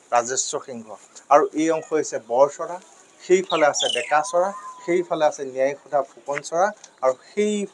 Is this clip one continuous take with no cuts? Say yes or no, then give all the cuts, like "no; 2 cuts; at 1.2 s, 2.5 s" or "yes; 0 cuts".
yes; 0 cuts